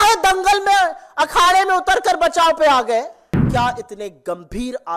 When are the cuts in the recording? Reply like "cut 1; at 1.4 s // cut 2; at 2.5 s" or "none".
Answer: cut 1; at 3.4 s